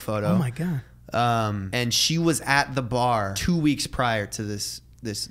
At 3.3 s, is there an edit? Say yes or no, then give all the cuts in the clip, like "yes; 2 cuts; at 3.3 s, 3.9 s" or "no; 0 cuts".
yes; 2 cuts; at 1.6 s, 3.3 s